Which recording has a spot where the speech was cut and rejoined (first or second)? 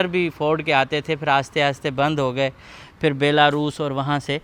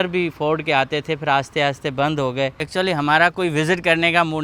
second